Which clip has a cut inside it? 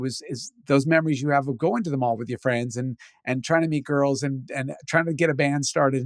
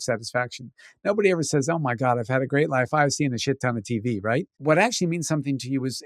second; 1 cut; at 4.5 s

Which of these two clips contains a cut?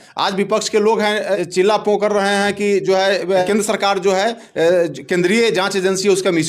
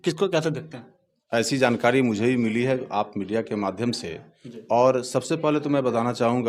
first; 2 cuts; at 1.3 s, 3.4 s

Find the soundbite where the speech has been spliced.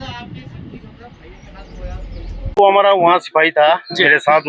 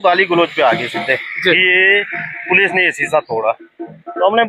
first; 1 cut; at 2.6 s

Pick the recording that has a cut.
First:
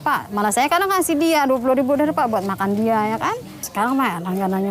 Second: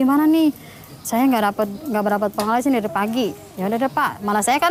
first; 1 cut; at 3.6 s

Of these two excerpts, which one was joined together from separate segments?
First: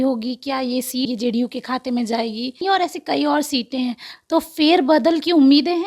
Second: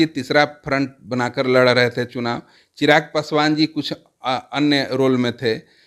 first; 2 cuts; at 1.1 s, 2.6 s

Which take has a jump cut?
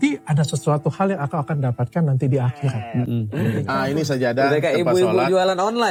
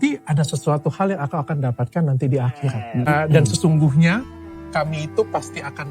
second; 1 cut; at 3.1 s

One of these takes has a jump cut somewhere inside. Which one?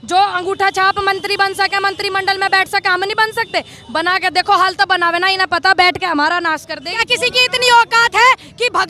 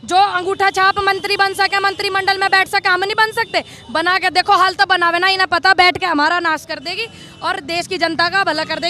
first; 1 cut; at 7.0 s

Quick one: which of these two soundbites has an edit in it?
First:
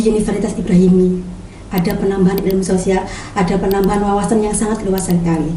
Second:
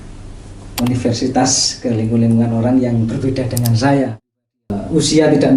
second; 1 cut; at 4.2 s

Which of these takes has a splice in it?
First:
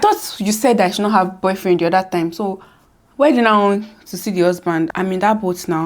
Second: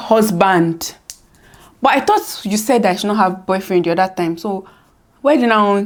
first; 1 cut; at 4.9 s

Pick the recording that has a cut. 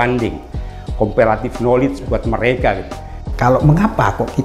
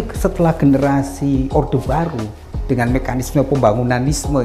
first; 1 cut; at 3.2 s

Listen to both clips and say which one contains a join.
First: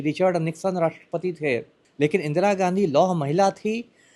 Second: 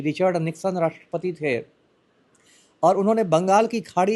first; 1 cut; at 1.8 s

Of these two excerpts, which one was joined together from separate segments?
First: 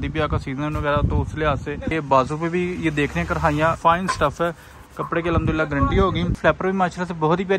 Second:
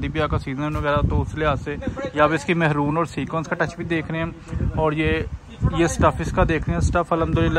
first; 3 cuts; at 1.9 s, 3.8 s, 6.4 s

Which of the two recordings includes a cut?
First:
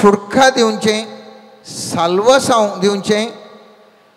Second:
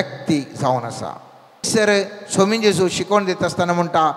second; 1 cut; at 1.7 s

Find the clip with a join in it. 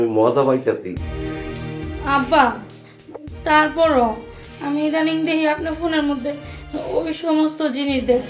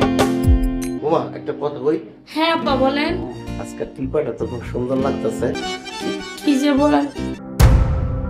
second; 2 cuts; at 0.9 s, 5.7 s

